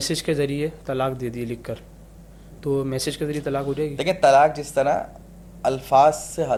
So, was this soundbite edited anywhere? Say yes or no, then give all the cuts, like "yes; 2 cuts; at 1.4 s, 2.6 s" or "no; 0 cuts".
no; 0 cuts